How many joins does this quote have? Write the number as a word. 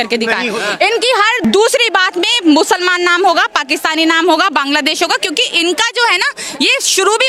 zero